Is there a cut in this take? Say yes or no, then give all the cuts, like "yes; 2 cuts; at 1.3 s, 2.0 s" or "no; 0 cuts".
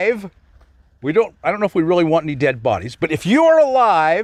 no; 0 cuts